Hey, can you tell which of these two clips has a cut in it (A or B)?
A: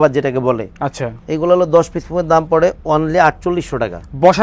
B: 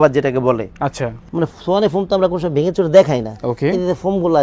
B